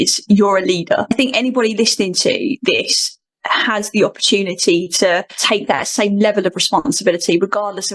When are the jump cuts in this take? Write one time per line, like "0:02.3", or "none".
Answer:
0:01.1
0:05.3

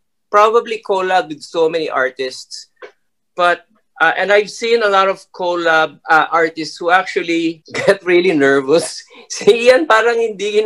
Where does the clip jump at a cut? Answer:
0:07.7

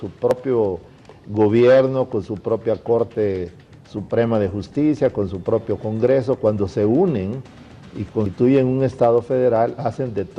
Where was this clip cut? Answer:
none

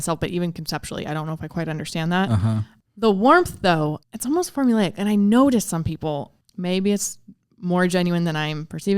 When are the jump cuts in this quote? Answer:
0:02.8
0:04.1
0:06.4

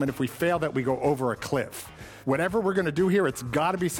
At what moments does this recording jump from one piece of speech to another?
0:02.1

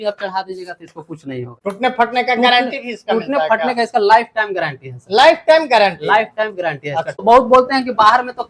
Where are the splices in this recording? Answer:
0:07.1

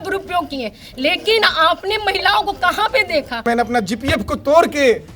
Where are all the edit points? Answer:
0:03.4

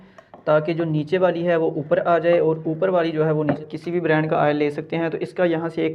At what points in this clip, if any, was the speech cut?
0:03.6

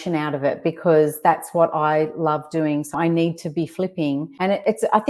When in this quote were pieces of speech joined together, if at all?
0:03.0
0:04.3

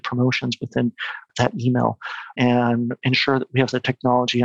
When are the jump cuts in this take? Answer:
0:01.3
0:02.3
0:03.0

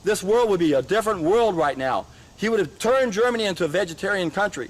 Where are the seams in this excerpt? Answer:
none

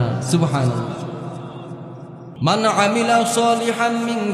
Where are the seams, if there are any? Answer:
0:02.3

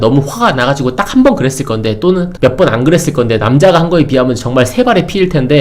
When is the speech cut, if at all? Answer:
0:02.3

